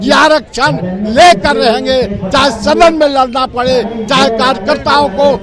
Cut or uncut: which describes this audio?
uncut